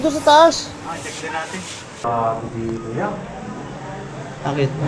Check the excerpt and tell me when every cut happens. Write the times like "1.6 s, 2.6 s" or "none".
2.0 s